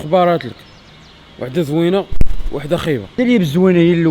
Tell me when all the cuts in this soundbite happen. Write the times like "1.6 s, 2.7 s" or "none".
3.1 s